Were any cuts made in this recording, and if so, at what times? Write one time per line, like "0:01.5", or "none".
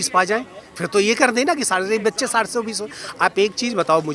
none